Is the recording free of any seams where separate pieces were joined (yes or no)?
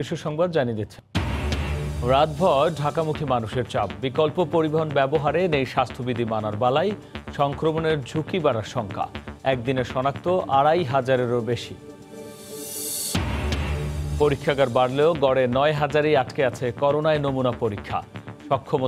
no